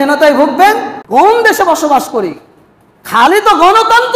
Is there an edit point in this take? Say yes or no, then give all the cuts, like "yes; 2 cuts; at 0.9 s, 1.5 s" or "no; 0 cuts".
yes; 1 cut; at 0.9 s